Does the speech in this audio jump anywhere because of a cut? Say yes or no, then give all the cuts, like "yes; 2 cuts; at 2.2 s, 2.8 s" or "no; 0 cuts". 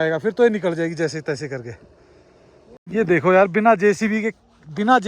yes; 1 cut; at 2.7 s